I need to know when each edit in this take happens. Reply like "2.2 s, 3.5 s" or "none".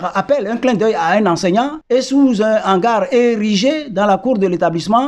1.8 s